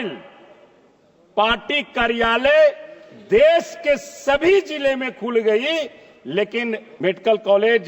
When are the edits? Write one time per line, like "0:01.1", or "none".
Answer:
0:06.9

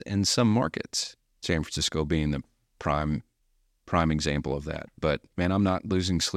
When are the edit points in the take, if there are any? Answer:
0:01.5
0:05.3

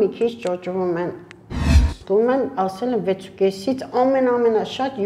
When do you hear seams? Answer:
0:01.8

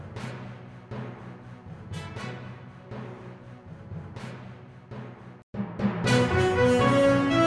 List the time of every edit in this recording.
none

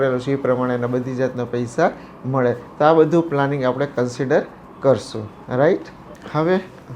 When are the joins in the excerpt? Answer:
none

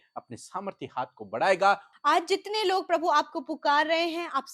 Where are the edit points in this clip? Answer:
0:01.9

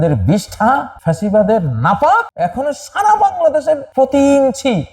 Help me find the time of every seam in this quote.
0:00.9
0:02.3
0:03.9

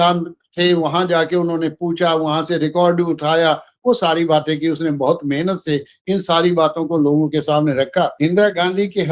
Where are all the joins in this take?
0:08.1

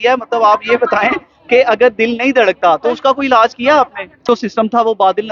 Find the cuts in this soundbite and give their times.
0:04.3

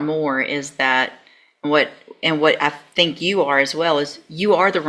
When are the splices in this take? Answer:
none

